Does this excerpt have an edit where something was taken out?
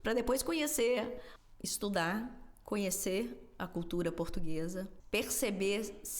yes; 2 cuts; at 1.3 s, 5.0 s

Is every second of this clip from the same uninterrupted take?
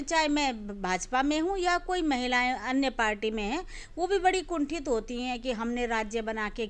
yes; 0 cuts

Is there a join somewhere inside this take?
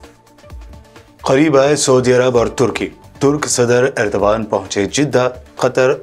yes; 1 cut; at 1.0 s

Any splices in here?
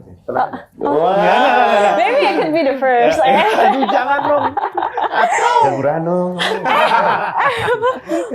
no; 0 cuts

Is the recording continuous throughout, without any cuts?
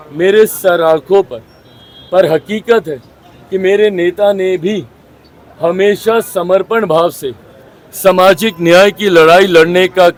yes; 0 cuts

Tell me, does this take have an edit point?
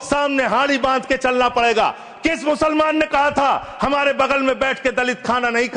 no; 0 cuts

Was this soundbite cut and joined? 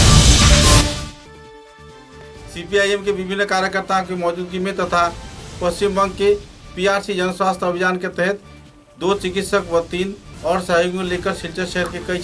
yes; 1 cut; at 0.9 s

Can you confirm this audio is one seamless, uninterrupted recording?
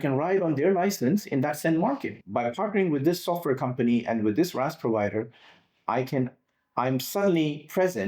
no; 1 cut; at 2.1 s

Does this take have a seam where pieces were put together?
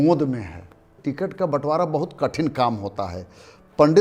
yes; 1 cut; at 1.0 s

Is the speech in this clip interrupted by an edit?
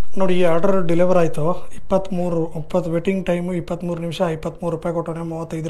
no; 0 cuts

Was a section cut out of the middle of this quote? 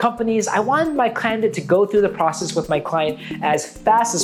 no; 0 cuts

